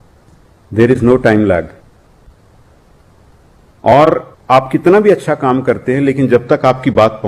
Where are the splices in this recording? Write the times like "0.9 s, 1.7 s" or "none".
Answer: none

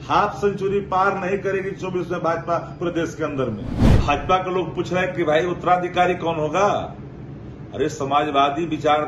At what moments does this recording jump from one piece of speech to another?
3.8 s

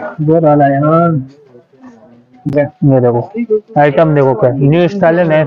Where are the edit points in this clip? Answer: 2.5 s

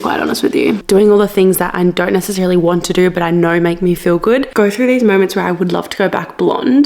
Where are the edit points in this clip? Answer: 0.8 s, 4.5 s

